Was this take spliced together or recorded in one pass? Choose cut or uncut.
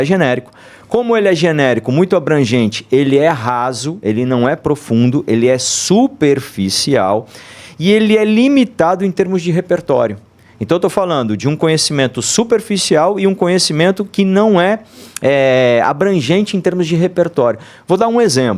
uncut